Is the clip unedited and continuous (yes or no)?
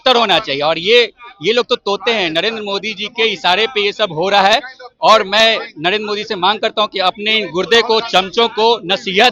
yes